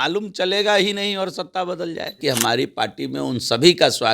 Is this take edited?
yes; 1 cut; at 2.2 s

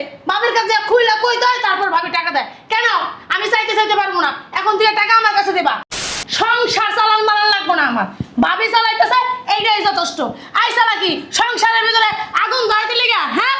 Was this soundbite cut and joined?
yes; 1 cut; at 5.9 s

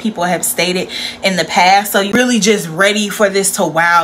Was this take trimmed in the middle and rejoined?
yes; 1 cut; at 2.0 s

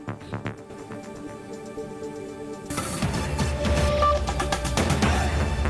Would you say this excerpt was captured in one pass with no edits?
no; 1 cut; at 0.9 s

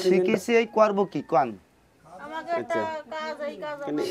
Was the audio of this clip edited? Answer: no; 0 cuts

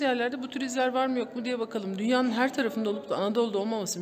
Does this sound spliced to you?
no; 0 cuts

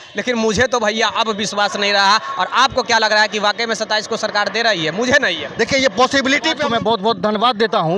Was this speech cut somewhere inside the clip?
yes; 1 cut; at 6.6 s

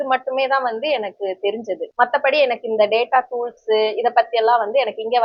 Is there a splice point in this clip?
no; 0 cuts

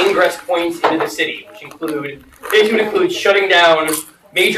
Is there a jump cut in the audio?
no; 0 cuts

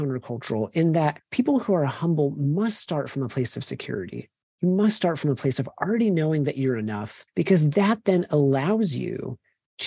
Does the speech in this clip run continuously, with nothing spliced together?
no; 1 cut; at 1.2 s

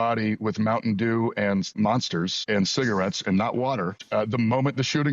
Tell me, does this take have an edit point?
yes; 2 cuts; at 1.8 s, 4.0 s

